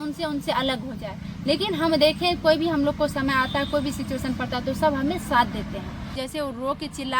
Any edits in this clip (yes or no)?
yes